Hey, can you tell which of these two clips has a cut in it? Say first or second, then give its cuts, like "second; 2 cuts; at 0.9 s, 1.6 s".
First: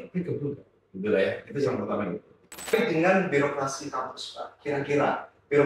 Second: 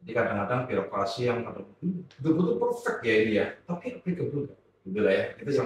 first; 1 cut; at 2.7 s